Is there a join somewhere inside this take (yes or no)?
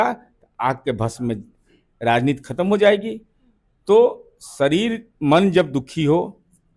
no